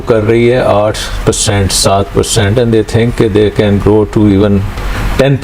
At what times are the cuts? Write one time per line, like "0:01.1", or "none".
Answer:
none